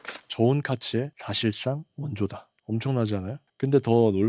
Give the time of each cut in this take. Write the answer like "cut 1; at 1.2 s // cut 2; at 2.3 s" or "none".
cut 1; at 1.2 s // cut 2; at 2.4 s // cut 3; at 3.4 s